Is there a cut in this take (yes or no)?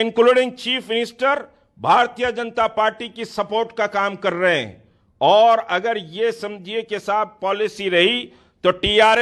no